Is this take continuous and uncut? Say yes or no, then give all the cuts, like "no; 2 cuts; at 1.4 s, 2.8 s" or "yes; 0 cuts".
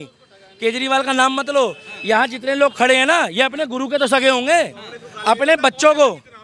yes; 0 cuts